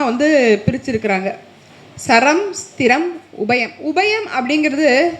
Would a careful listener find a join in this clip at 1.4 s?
no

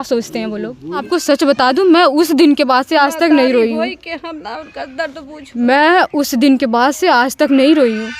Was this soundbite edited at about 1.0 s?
yes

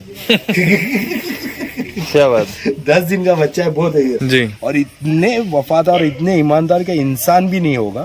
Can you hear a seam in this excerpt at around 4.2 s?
yes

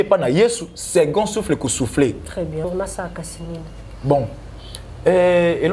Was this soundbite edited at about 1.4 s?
no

